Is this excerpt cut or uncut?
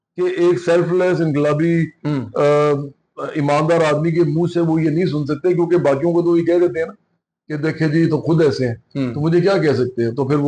uncut